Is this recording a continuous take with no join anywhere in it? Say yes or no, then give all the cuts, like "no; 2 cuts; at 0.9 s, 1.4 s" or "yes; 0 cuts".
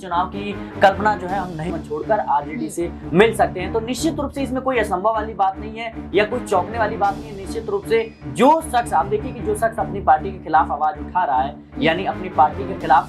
no; 1 cut; at 1.7 s